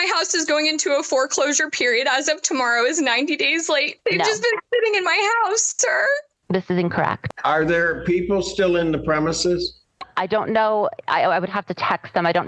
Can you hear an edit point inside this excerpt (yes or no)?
yes